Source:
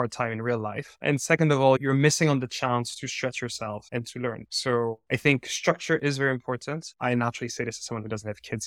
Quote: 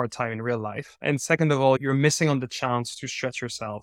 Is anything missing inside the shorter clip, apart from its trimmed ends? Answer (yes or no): no